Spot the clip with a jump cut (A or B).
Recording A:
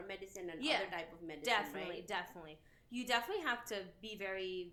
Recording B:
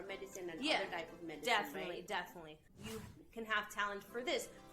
B